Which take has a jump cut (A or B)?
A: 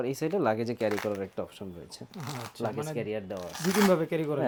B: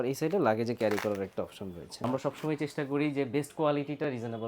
B